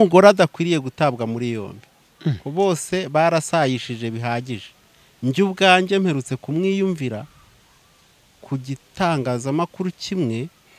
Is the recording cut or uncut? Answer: uncut